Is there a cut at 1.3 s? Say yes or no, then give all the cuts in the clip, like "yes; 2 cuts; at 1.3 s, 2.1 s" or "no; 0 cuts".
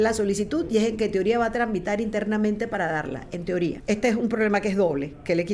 no; 1 cut; at 3.8 s